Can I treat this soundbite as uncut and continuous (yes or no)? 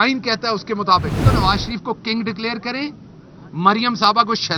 no